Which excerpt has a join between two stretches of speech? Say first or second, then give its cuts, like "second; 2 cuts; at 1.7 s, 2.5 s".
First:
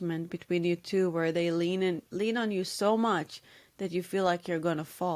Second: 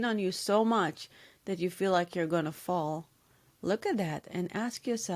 second; 1 cut; at 4.3 s